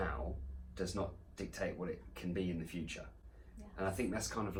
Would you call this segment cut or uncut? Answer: uncut